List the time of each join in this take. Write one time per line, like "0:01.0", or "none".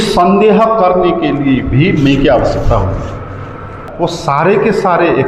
0:03.9